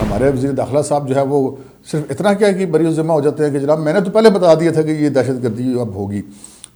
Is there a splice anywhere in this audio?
no; 0 cuts

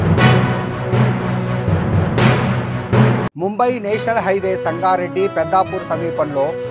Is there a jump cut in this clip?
yes; 1 cut; at 3.3 s

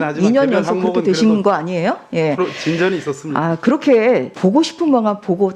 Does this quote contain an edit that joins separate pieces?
yes; 1 cut; at 4.3 s

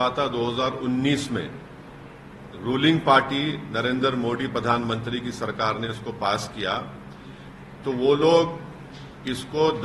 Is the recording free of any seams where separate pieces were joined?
yes; 0 cuts

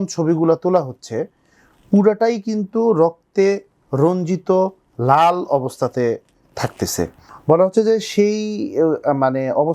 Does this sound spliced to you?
yes; 1 cut; at 7.3 s

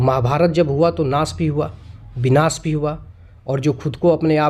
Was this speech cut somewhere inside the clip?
no; 0 cuts

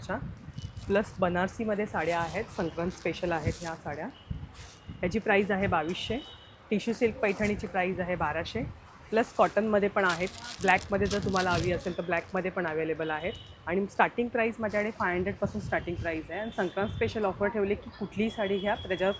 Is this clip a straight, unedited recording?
yes; 0 cuts

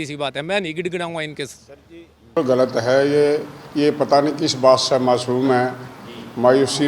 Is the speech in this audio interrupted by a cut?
yes; 1 cut; at 2.4 s

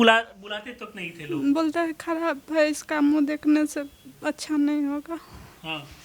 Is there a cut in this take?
no; 0 cuts

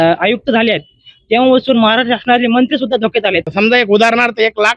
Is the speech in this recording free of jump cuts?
no; 1 cut; at 3.5 s

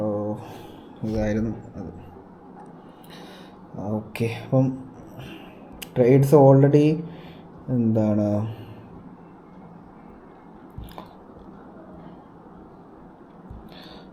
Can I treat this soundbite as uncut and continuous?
yes; 0 cuts

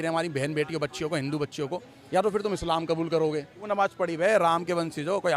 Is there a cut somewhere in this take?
yes; 2 cuts; at 1.9 s, 3.6 s

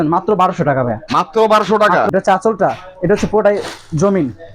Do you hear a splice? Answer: yes; 1 cut; at 2.1 s

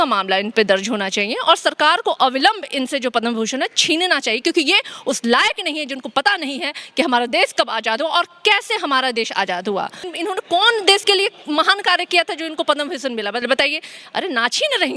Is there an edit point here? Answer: yes; 1 cut; at 10.1 s

